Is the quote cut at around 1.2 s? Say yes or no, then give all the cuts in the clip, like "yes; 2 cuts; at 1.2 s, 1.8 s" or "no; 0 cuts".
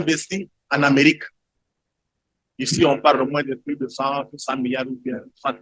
no; 0 cuts